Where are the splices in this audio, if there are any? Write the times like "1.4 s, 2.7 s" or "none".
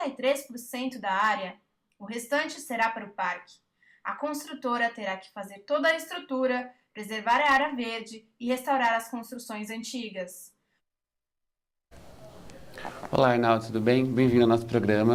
none